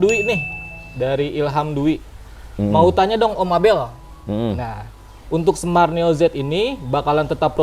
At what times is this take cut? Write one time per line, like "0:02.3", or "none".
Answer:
none